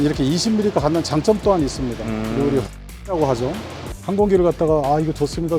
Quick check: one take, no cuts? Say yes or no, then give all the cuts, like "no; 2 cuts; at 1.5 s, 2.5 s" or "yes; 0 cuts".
no; 1 cut; at 3.9 s